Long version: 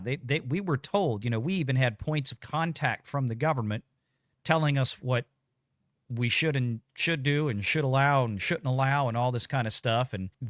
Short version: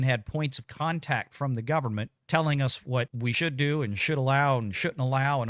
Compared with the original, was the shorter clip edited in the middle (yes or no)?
yes